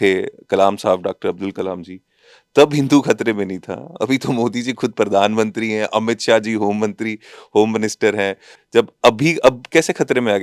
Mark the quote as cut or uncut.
cut